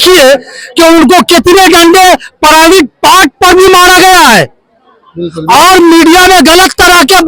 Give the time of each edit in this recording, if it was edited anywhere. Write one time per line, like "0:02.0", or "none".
none